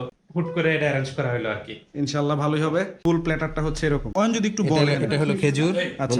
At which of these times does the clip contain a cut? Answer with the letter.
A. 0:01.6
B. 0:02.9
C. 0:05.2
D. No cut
B